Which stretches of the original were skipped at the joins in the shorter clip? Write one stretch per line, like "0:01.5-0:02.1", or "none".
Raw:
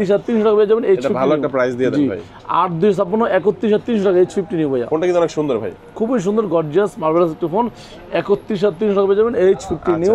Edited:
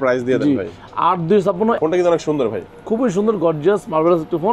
0:03.3-0:04.9

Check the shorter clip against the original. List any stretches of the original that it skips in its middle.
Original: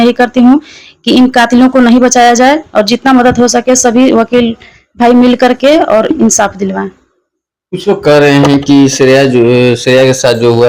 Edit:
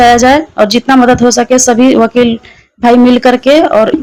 none

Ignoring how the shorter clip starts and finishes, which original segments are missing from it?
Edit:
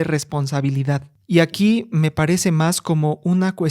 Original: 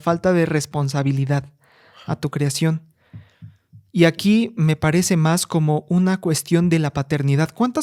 0:01.5-0:03.8

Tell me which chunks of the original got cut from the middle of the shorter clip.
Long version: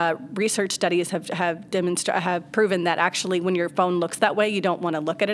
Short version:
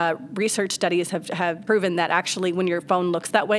0:01.6-0:02.5

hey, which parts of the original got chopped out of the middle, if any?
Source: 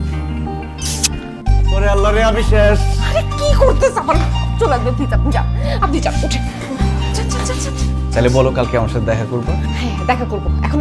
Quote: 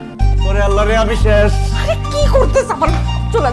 none

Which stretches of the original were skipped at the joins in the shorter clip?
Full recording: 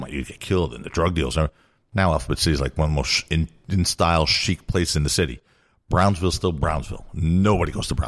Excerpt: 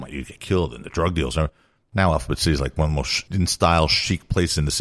0:03.2-0:03.6

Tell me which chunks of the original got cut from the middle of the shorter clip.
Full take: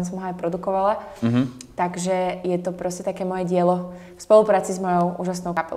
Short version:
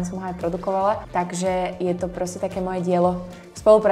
0:01.0-0:01.7

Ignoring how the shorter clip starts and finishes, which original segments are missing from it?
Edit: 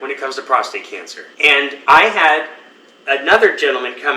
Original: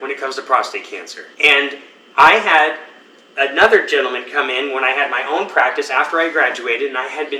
0:01.8-0:02.1

